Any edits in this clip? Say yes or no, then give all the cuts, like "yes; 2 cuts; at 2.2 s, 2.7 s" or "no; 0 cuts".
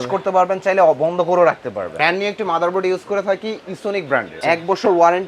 yes; 2 cuts; at 1.9 s, 4.4 s